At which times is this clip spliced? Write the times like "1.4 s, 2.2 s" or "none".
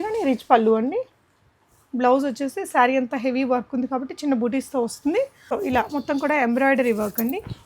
5.4 s